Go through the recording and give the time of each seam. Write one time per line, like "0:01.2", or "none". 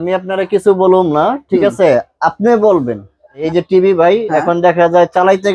0:03.4